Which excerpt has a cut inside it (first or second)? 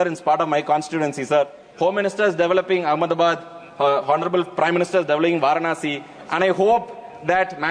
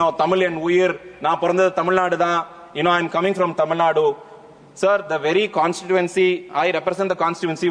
first